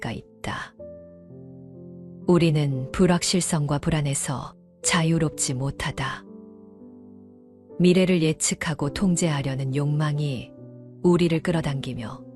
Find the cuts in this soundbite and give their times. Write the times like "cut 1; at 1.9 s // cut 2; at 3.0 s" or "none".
none